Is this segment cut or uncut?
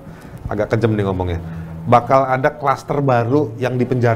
uncut